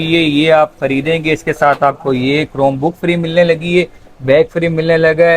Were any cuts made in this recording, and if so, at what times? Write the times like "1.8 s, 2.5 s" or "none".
none